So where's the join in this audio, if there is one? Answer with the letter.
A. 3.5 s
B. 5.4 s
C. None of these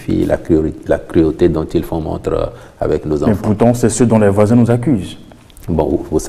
C